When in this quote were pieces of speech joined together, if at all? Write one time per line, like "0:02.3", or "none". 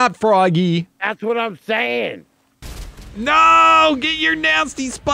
0:02.6